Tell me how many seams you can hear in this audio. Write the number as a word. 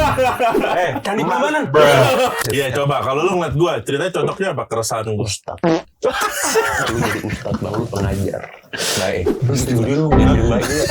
one